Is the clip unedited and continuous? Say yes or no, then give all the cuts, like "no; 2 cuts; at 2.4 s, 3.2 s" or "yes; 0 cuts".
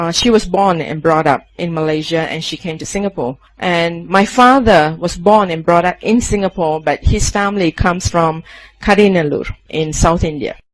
yes; 0 cuts